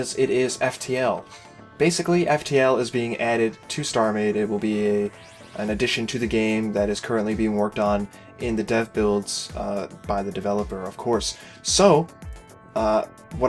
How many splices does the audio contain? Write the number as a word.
one